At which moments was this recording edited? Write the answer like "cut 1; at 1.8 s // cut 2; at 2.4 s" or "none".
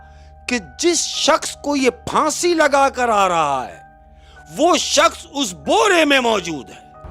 none